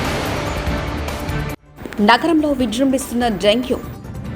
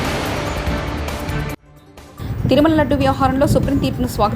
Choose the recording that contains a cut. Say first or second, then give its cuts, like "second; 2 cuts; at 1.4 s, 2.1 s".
second; 1 cut; at 1.6 s